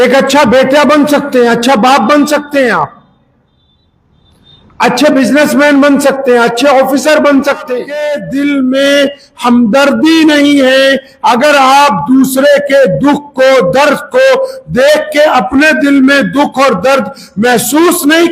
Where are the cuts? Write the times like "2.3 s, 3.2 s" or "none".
8.1 s